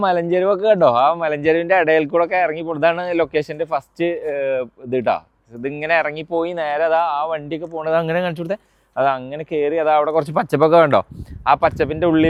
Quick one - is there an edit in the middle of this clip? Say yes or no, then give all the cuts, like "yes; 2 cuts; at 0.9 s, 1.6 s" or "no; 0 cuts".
no; 0 cuts